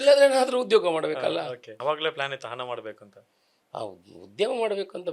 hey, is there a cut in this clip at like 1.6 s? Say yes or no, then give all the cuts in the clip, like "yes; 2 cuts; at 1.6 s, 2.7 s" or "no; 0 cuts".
yes; 1 cut; at 1.6 s